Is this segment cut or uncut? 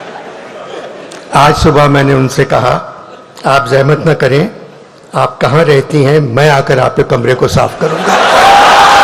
uncut